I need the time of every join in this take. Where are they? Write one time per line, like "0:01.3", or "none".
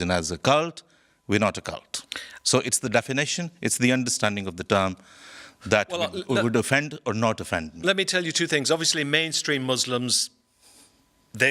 none